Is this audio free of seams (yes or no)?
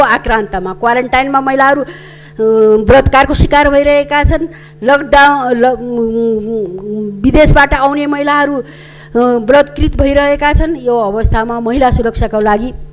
yes